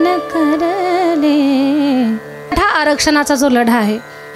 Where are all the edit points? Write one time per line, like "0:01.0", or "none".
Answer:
0:02.5